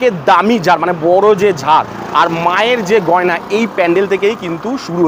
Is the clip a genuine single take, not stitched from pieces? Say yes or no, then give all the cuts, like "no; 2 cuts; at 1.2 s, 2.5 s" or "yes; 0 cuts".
yes; 0 cuts